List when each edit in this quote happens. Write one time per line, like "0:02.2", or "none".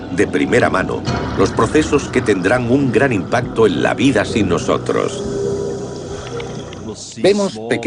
0:02.6